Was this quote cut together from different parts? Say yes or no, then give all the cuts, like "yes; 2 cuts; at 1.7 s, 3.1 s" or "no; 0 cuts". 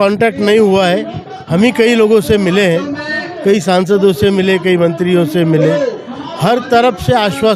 no; 0 cuts